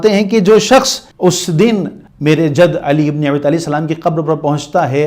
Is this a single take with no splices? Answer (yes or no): no